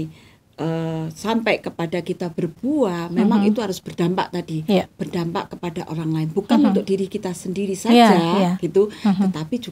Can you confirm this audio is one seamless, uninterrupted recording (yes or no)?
yes